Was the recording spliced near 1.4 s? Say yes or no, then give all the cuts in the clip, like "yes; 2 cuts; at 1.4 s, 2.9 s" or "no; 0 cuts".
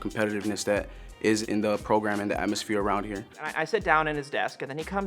yes; 2 cuts; at 1.4 s, 3.5 s